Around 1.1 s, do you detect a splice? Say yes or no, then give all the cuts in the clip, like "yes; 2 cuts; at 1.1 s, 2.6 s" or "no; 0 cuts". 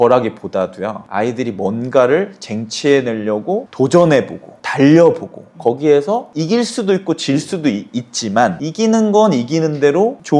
no; 0 cuts